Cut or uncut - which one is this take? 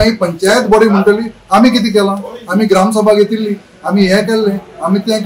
uncut